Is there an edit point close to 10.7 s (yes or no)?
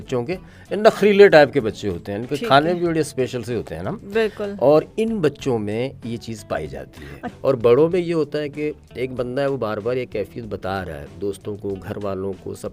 no